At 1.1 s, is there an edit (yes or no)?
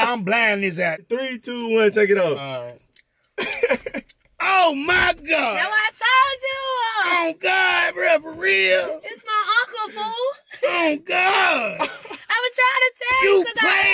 yes